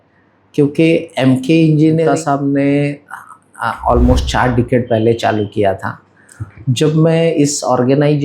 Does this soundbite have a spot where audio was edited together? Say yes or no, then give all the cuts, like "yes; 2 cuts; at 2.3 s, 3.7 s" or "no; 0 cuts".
yes; 1 cut; at 2.1 s